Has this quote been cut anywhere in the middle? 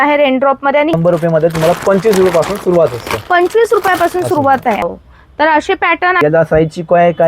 yes; 3 cuts; at 0.9 s, 4.9 s, 6.2 s

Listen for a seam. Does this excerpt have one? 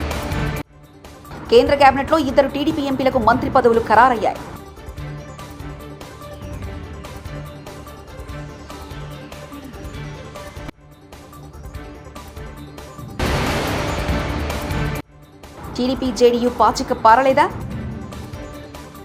no; 0 cuts

